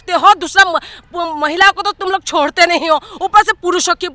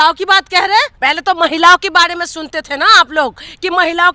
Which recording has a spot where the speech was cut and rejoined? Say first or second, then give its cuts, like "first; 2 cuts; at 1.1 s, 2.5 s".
second; 1 cut; at 0.9 s